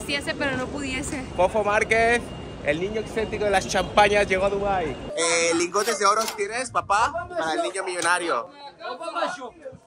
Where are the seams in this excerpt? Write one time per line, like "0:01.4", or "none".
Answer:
0:05.0